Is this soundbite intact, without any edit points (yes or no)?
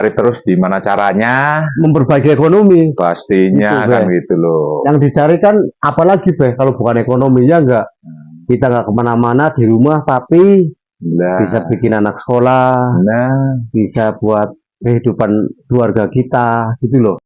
yes